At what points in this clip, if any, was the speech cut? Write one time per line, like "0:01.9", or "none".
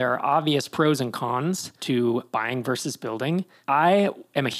0:01.7
0:02.3